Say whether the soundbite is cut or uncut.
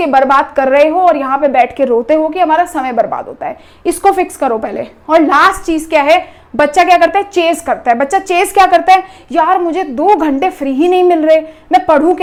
uncut